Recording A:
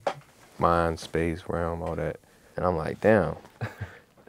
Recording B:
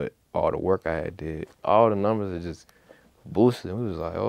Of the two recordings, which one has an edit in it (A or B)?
B